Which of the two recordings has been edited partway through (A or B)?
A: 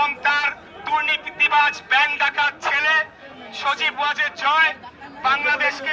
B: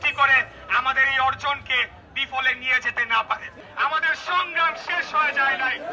B